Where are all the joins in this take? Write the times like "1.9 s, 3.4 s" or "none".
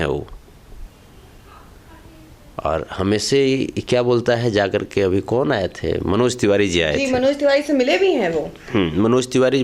none